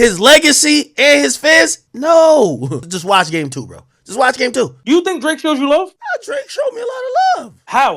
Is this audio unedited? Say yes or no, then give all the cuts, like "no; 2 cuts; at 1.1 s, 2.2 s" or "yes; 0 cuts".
no; 1 cut; at 4.8 s